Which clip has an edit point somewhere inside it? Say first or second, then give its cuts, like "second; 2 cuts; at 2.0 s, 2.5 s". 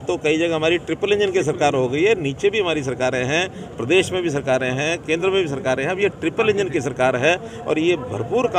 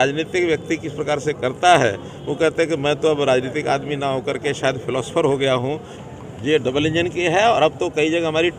second; 1 cut; at 5.9 s